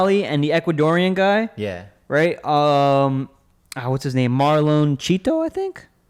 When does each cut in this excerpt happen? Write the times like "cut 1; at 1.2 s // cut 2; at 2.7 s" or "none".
none

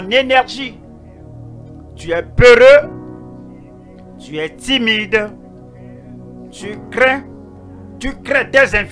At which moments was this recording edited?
none

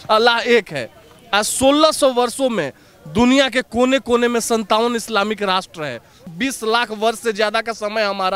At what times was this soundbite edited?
cut 1; at 6.2 s

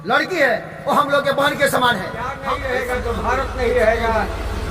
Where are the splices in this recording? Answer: cut 1; at 2.3 s

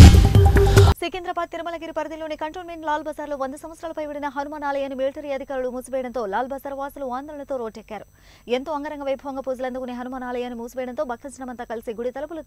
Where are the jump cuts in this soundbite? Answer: cut 1; at 1.0 s

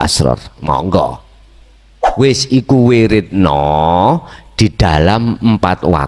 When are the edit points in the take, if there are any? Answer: cut 1; at 2.0 s

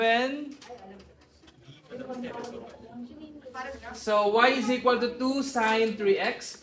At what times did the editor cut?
none

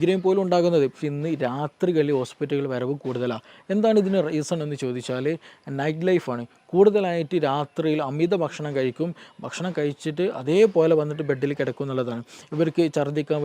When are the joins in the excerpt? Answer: cut 1; at 1.1 s

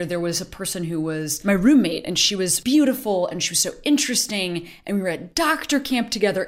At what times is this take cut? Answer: cut 1; at 1.3 s // cut 2; at 2.6 s

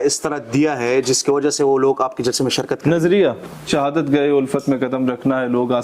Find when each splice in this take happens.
cut 1; at 3.7 s

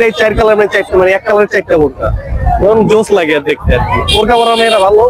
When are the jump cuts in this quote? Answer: none

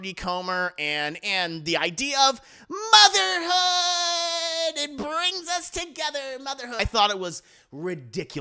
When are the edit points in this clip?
cut 1; at 6.8 s

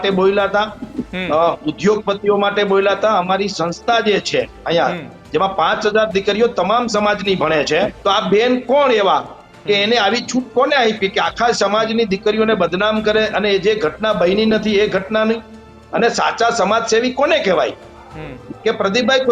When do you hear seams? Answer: cut 1; at 8.0 s

